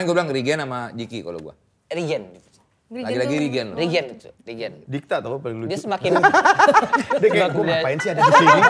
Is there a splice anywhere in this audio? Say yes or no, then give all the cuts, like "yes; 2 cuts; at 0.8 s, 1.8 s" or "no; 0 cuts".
no; 0 cuts